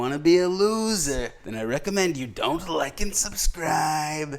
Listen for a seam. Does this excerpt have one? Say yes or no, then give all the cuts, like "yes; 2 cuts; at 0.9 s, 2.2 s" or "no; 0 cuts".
yes; 1 cut; at 1.4 s